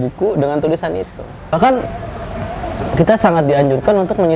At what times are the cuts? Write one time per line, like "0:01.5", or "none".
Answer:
0:01.5

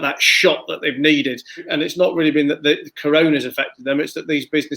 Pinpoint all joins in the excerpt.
0:01.5

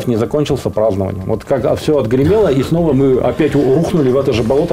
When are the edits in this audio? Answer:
none

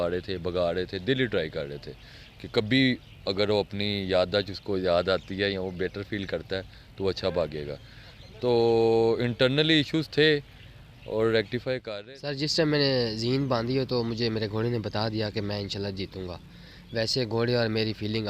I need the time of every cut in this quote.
0:11.8

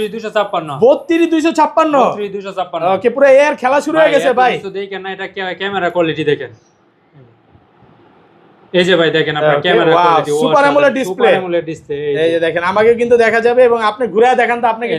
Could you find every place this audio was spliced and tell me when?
none

